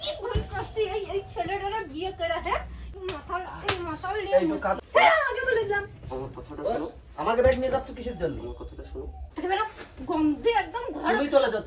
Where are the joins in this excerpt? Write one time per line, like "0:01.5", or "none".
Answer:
0:02.9
0:04.8
0:09.3